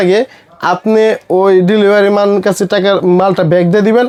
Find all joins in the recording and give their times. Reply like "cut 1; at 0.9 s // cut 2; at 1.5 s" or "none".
none